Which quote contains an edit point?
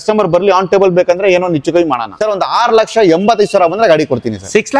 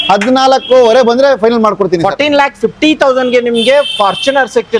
first; 1 cut; at 2.1 s

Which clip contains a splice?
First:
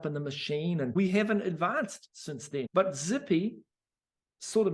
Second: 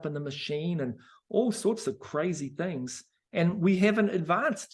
first; 2 cuts; at 0.9 s, 2.7 s

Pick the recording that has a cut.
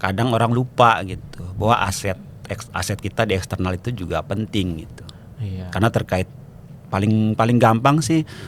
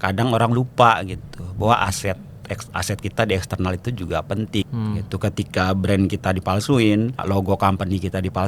second; 2 cuts; at 4.6 s, 7.2 s

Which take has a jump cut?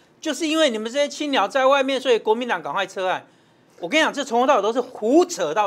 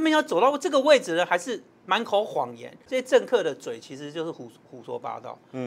second; 1 cut; at 2.8 s

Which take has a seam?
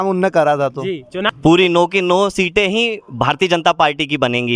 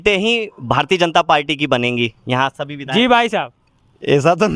first; 1 cut; at 1.2 s

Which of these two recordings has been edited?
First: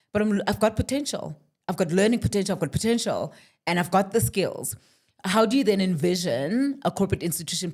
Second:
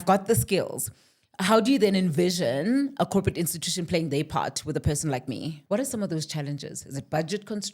second; 1 cut; at 5.6 s

